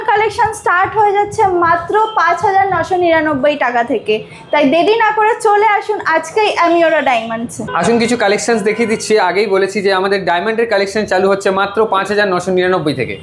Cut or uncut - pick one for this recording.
uncut